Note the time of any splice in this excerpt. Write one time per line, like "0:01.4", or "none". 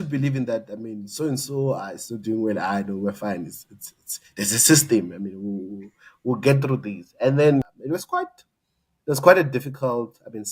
0:07.7